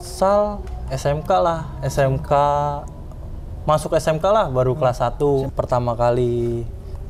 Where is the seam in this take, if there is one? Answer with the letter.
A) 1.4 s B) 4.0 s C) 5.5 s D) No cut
C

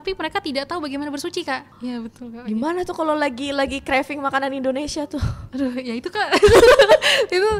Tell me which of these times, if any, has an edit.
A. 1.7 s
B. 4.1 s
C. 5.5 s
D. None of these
A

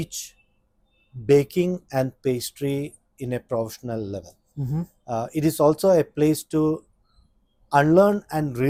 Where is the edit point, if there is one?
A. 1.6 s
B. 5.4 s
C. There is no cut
C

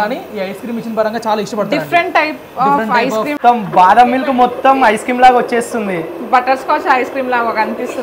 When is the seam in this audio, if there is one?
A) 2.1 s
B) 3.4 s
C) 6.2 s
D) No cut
B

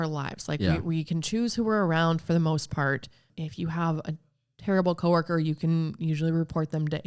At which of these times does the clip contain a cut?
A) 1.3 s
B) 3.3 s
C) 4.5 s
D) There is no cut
B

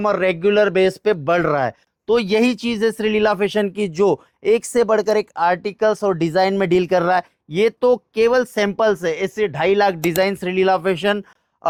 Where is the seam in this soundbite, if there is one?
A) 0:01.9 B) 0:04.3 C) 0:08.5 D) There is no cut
D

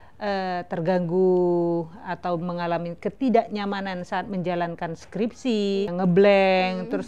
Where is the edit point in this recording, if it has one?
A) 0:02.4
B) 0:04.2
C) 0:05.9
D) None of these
C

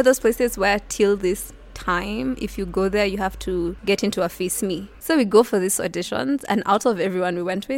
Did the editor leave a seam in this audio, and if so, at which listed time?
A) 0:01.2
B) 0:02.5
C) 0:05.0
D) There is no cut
C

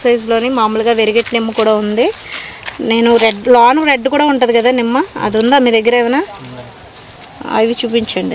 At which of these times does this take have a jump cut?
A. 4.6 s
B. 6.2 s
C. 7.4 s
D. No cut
D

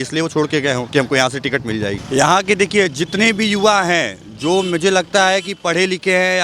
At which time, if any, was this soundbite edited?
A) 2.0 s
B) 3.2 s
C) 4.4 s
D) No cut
A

